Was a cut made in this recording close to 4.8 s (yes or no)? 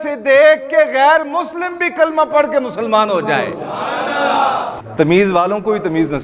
yes